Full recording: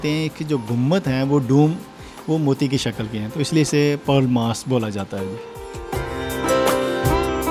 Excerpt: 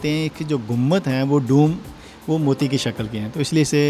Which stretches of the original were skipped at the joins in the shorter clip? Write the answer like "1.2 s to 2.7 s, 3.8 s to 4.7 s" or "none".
none